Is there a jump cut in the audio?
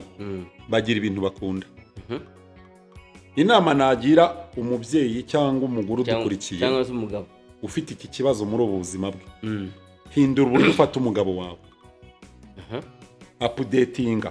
no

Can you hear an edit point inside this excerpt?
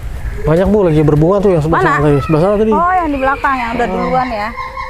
no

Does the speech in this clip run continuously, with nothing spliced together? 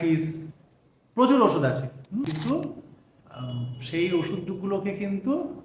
no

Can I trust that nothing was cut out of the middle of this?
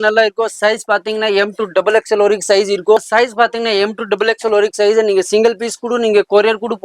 no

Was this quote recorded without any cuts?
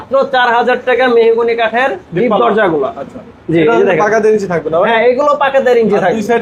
yes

